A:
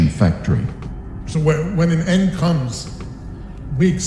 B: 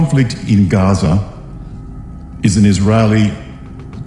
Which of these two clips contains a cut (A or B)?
A